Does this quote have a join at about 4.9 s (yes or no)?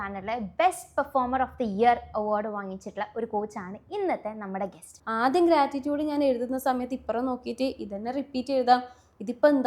yes